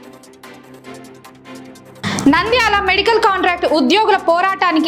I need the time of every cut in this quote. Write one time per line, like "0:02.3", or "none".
0:01.5